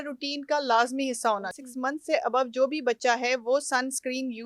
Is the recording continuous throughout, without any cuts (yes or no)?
no